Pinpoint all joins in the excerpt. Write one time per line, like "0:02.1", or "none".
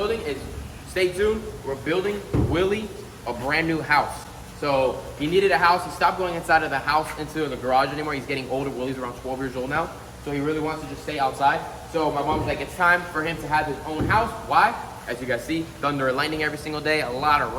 none